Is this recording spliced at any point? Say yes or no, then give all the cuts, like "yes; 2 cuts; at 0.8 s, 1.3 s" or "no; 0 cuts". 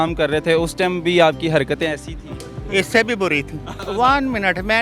yes; 1 cut; at 3.7 s